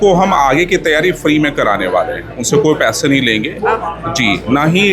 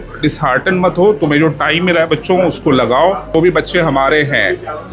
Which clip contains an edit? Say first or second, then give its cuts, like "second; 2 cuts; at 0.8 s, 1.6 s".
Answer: second; 1 cut; at 3.3 s